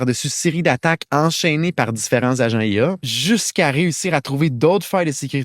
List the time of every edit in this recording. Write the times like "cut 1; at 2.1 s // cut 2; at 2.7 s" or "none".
cut 1; at 3.1 s